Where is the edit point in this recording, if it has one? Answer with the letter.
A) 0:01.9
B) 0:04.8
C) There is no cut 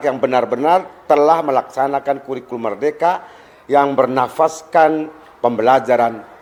C